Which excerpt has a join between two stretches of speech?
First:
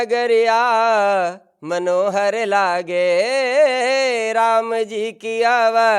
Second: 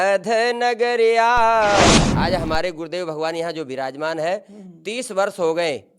second; 1 cut; at 2.0 s

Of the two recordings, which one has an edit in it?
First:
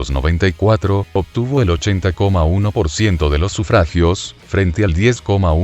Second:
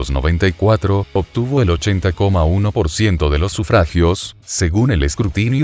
first; 1 cut; at 4.4 s

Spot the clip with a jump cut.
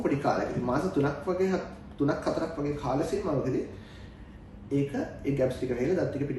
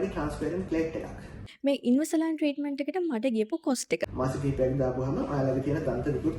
second; 2 cuts; at 1.4 s, 4.1 s

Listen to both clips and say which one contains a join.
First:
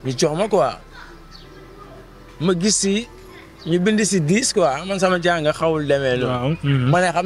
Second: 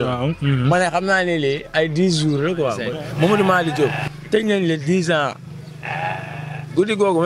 second; 1 cut; at 2.8 s

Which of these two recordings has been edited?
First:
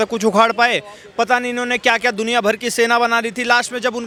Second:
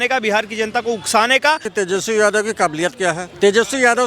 second; 1 cut; at 1.7 s

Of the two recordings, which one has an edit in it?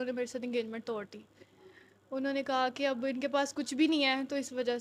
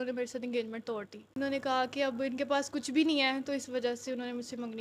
second; 1 cut; at 1.4 s

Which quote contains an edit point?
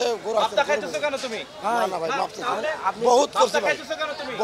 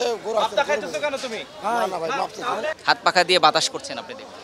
second; 1 cut; at 2.8 s

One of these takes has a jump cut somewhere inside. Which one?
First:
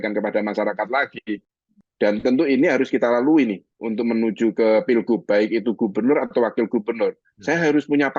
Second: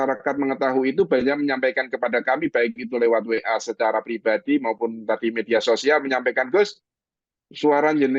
first; 1 cut; at 1.7 s

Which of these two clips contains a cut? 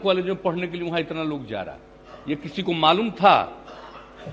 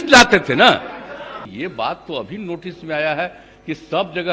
second; 1 cut; at 1.4 s

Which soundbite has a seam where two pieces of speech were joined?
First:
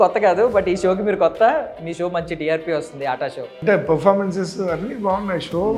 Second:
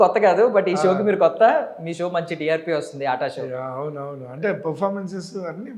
first; 1 cut; at 3.5 s

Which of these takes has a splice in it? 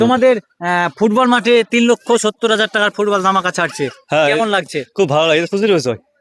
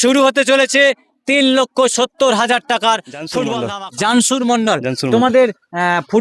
second; 1 cut; at 3.7 s

